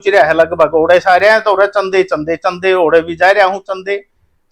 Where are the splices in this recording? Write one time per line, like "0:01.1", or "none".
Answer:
none